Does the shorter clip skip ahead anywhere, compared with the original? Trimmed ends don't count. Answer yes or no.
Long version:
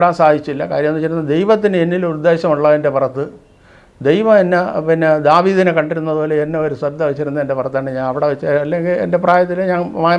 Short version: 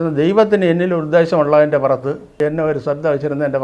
yes